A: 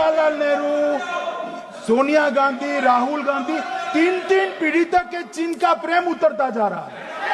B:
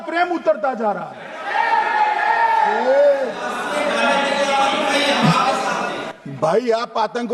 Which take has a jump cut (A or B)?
B